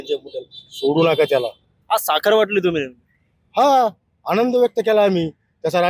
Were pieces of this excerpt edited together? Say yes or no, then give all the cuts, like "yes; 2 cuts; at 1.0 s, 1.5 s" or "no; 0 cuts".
no; 0 cuts